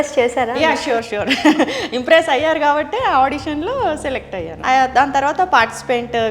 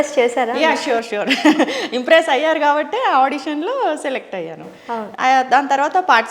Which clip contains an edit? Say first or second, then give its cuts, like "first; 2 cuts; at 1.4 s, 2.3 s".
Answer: first; 1 cut; at 4.5 s